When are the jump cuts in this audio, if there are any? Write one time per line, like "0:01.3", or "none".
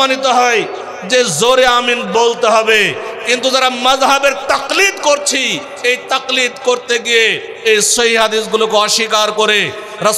none